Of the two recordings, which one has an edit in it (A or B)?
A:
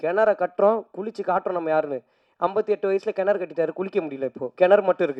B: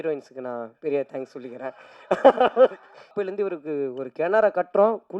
B